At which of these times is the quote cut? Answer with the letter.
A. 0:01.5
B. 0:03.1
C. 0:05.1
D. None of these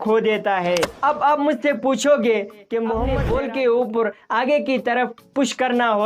B